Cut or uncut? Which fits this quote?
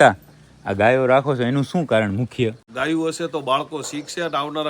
cut